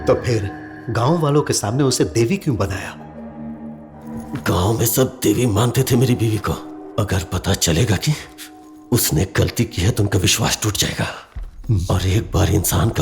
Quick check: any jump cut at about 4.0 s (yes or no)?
yes